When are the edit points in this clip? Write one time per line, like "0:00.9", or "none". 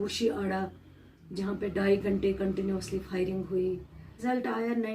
0:04.1

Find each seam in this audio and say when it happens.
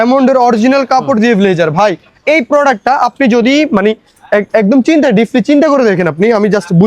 none

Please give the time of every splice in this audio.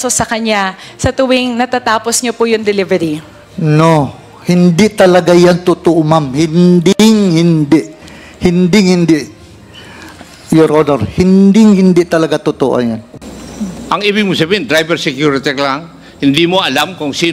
0:13.1

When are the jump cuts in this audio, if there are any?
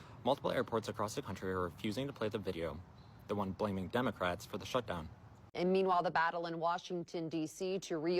0:05.4

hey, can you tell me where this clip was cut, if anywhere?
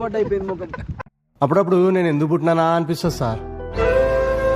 0:00.9

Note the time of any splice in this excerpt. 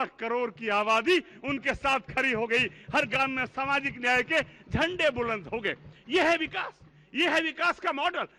none

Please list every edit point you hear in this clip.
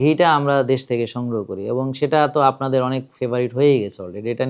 none

